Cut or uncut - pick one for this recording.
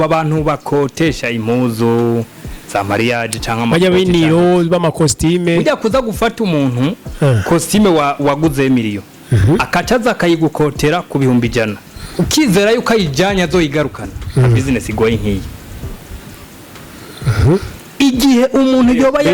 uncut